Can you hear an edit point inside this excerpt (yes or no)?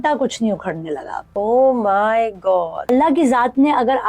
yes